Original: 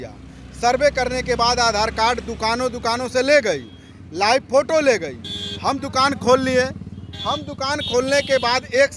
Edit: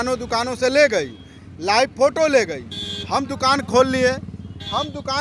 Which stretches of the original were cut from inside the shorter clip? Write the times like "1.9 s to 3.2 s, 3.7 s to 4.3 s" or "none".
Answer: none